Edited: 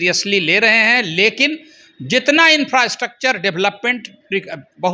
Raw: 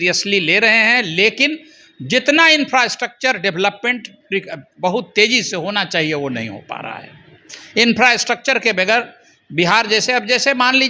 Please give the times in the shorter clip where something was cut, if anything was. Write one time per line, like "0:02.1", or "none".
none